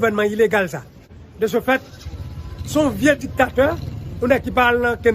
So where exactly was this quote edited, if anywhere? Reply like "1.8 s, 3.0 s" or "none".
1.0 s